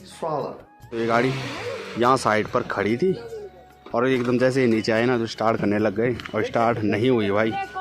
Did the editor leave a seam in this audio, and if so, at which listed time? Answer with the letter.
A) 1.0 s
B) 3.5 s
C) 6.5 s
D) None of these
A